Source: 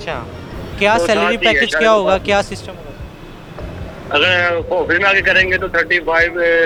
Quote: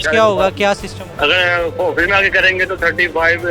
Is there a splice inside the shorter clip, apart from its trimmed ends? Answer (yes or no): yes